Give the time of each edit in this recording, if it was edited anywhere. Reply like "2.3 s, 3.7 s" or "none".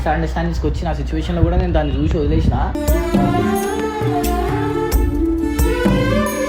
none